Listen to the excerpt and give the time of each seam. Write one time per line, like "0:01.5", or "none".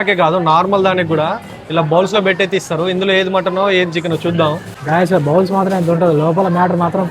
none